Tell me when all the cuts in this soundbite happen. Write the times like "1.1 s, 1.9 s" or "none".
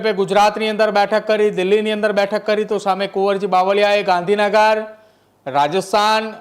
none